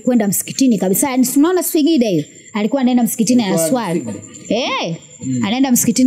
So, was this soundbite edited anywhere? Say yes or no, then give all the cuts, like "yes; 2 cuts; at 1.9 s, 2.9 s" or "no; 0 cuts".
no; 0 cuts